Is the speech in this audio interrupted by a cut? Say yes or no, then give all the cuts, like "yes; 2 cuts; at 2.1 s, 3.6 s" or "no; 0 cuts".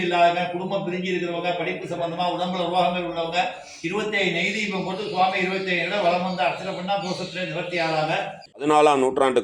yes; 1 cut; at 8.5 s